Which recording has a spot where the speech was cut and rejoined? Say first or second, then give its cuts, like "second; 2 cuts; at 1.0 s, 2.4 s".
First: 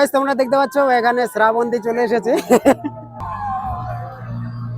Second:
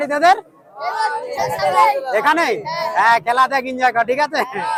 first; 1 cut; at 3.2 s